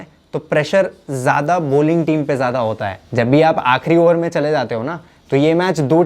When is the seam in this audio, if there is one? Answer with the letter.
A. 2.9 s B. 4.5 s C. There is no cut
A